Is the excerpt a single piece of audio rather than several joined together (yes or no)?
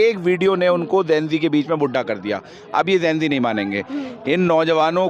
yes